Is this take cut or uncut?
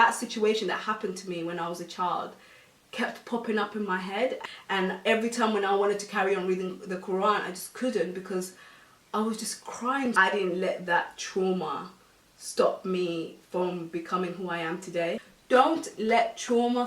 cut